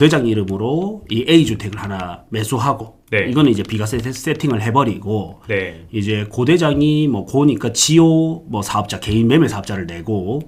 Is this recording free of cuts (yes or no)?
yes